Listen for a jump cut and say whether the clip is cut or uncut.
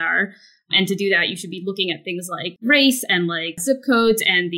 cut